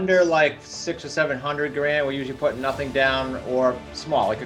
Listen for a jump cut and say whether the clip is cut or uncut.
uncut